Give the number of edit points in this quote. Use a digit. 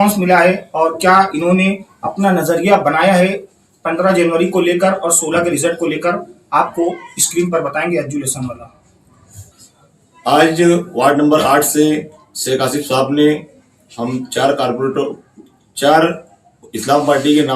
1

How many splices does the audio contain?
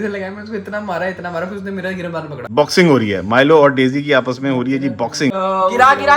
2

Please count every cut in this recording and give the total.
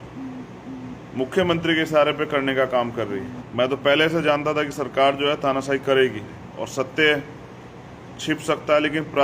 2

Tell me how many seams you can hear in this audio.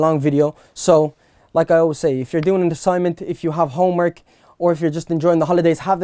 0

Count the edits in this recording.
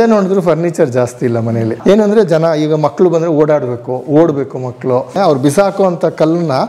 2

